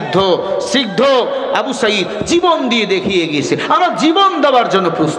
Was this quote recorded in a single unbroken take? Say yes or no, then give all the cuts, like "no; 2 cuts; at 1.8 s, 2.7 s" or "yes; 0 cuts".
no; 2 cuts; at 2.4 s, 2.4 s